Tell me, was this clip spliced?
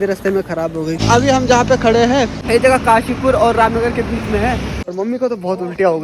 yes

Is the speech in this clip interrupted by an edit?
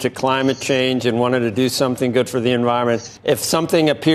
yes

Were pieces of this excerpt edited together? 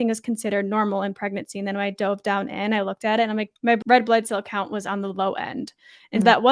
yes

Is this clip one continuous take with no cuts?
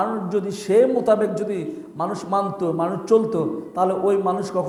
yes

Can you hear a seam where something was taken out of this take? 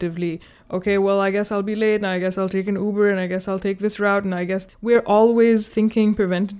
yes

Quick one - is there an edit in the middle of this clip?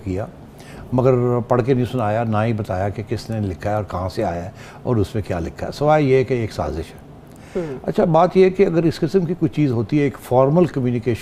no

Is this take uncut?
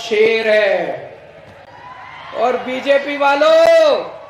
yes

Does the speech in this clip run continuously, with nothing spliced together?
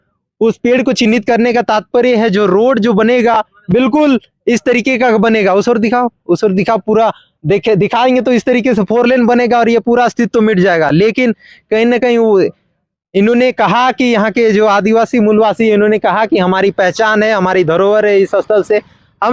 yes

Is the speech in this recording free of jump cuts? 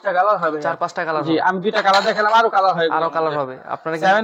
yes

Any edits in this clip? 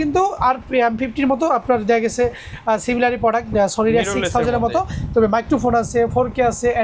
no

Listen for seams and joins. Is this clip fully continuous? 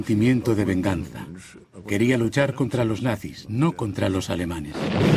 no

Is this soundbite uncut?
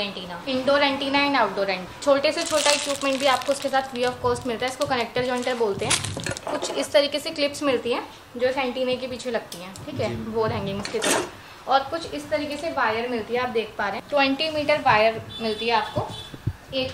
yes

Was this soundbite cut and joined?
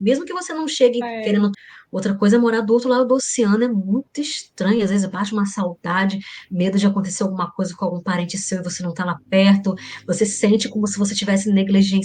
no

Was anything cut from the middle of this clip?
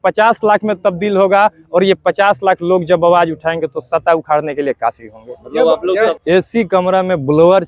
yes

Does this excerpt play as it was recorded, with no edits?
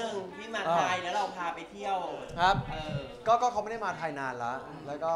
yes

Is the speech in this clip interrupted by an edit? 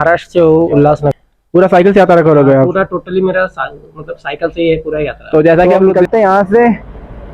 yes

